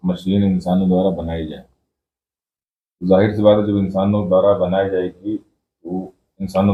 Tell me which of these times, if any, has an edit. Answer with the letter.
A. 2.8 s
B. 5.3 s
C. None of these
C